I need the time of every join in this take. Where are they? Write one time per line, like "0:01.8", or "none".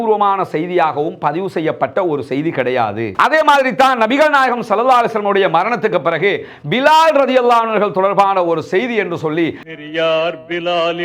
0:03.1
0:09.7